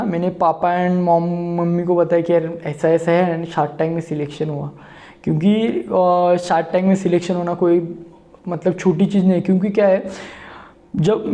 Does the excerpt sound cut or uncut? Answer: uncut